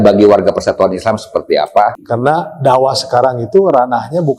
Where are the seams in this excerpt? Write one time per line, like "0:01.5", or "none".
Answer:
0:02.0